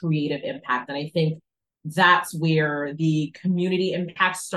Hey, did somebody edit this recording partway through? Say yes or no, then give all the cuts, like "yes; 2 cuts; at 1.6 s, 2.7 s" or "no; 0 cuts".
no; 0 cuts